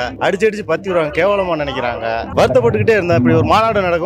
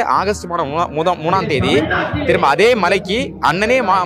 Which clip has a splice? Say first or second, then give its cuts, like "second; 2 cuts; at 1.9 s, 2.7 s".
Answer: first; 1 cut; at 2.3 s